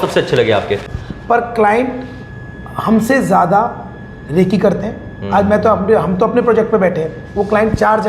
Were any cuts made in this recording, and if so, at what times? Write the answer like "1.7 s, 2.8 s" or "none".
0.9 s